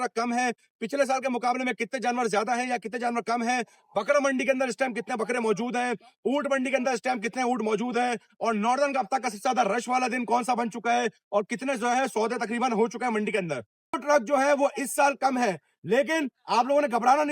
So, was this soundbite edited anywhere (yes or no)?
yes